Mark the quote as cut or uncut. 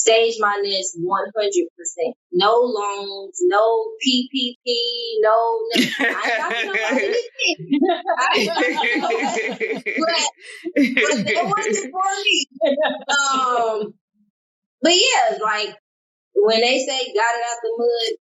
uncut